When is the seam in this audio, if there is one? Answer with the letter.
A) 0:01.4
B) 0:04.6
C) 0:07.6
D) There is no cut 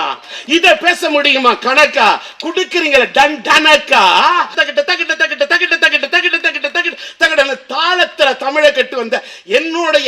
B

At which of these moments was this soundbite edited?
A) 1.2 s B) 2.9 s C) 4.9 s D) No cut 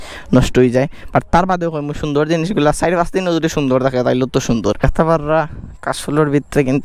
C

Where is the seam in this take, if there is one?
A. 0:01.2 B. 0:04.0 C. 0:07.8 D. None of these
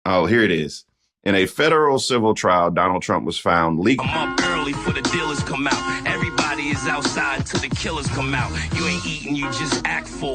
B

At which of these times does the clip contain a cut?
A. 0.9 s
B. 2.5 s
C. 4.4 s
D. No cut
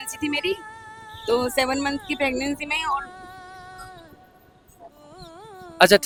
D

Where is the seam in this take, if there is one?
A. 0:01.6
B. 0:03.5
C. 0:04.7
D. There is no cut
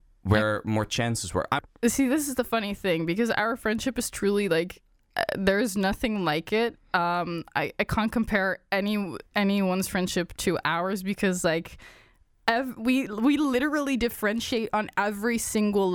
A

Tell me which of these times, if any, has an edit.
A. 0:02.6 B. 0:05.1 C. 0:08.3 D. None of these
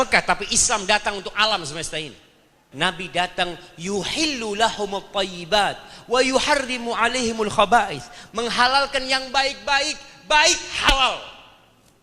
A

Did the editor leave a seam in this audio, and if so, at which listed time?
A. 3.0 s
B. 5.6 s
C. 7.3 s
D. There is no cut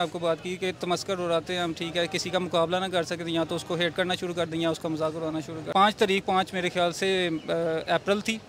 B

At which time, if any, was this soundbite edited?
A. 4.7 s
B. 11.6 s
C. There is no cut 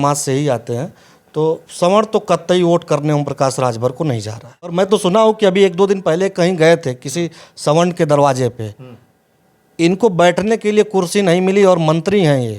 A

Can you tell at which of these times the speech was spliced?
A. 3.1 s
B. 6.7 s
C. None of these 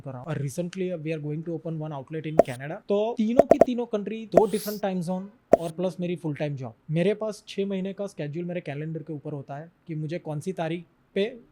C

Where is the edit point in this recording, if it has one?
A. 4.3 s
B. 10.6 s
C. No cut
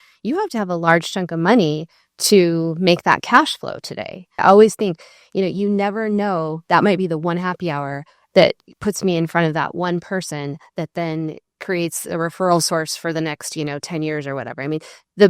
A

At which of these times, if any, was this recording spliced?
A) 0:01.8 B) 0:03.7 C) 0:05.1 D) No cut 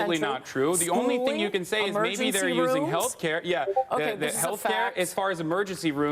B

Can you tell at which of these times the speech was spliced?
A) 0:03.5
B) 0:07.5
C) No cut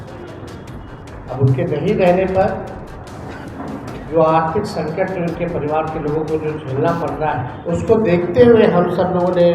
B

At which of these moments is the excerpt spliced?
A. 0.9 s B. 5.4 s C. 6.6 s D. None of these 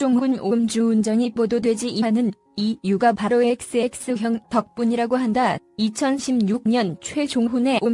A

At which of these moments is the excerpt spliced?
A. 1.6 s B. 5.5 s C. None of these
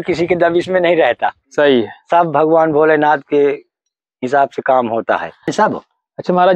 B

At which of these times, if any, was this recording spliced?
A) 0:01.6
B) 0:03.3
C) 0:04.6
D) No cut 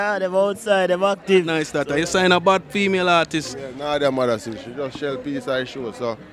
A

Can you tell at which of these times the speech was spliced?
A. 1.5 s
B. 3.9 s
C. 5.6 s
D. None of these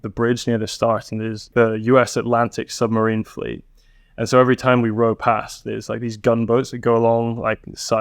A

